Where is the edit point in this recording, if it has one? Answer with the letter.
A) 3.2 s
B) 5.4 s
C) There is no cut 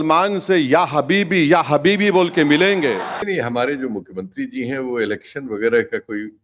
A